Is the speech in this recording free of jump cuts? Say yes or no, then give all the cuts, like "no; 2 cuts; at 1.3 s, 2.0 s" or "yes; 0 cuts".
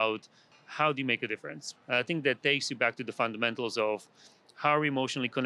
yes; 0 cuts